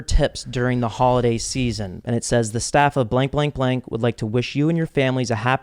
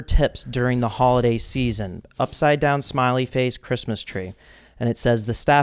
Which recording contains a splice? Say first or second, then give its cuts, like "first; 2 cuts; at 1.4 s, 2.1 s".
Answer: first; 1 cut; at 1.9 s